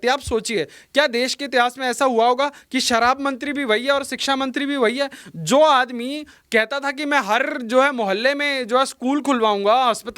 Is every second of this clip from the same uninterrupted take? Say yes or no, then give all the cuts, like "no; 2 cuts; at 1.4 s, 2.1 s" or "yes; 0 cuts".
yes; 0 cuts